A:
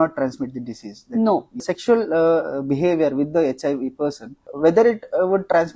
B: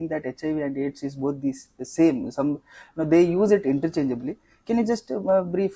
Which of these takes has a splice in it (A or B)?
A